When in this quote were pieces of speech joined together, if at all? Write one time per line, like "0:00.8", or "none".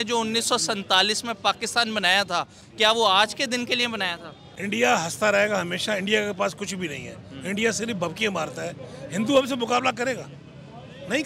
none